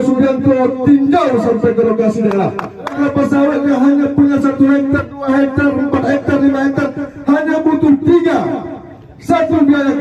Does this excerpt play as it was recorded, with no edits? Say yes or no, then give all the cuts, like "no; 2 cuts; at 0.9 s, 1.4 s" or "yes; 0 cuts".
no; 1 cut; at 3.0 s